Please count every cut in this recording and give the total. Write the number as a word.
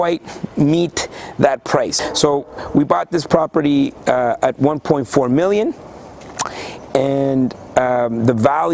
one